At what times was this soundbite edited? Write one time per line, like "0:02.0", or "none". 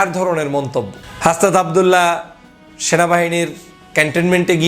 0:01.0